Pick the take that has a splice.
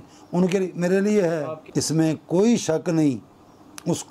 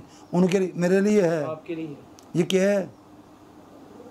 first; 1 cut; at 1.6 s

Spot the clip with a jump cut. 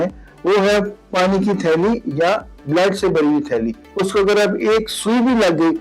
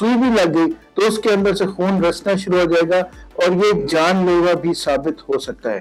first; 1 cut; at 3.8 s

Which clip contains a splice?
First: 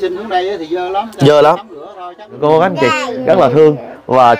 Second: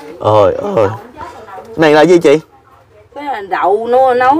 first; 1 cut; at 2.3 s

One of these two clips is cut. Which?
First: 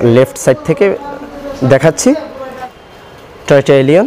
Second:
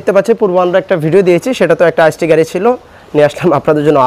first; 1 cut; at 2.5 s

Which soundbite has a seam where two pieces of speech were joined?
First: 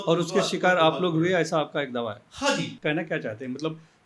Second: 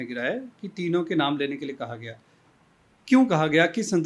first; 1 cut; at 2.7 s

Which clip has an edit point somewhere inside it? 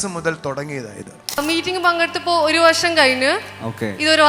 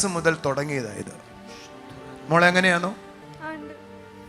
first; 1 cut; at 1.4 s

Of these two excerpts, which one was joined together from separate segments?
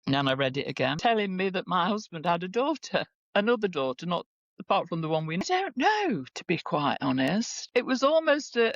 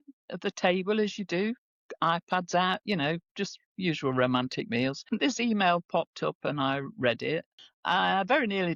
first; 2 cuts; at 1.0 s, 5.4 s

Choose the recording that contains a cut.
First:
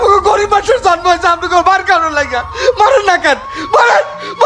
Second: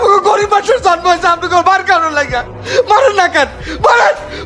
first; 1 cut; at 2.5 s

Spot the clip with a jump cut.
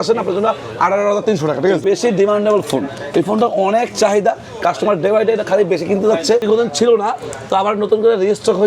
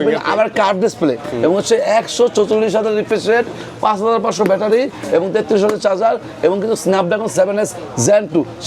first; 2 cuts; at 1.8 s, 6.5 s

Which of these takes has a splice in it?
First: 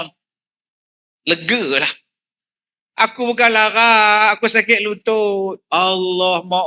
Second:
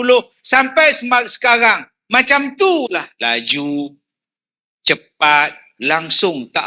second; 2 cuts; at 3.1 s, 5.7 s

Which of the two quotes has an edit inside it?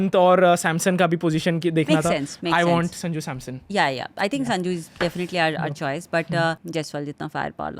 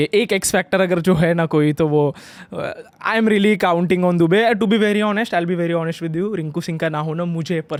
first; 1 cut; at 6.6 s

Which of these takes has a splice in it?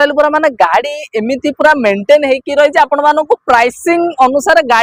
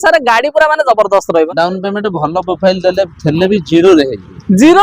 second; 1 cut; at 1.5 s

